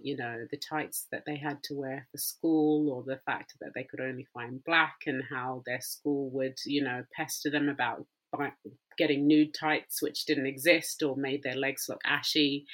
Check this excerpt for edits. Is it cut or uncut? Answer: uncut